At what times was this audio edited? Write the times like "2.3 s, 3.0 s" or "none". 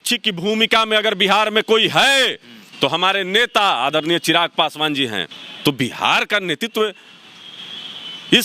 5.3 s